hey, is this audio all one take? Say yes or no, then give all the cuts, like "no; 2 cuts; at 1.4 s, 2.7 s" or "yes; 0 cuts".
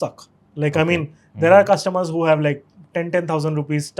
yes; 0 cuts